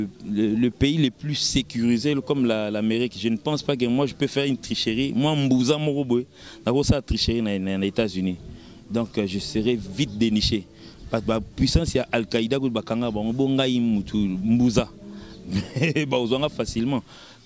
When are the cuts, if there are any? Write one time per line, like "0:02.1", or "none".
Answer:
none